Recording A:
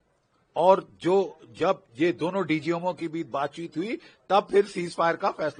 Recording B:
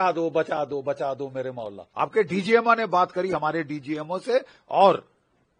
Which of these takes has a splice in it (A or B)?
B